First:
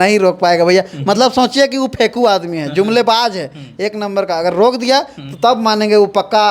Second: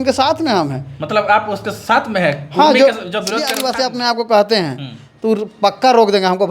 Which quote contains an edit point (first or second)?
second